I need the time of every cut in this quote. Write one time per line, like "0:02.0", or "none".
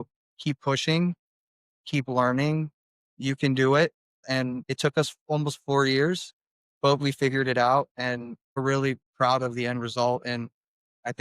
0:04.5
0:08.6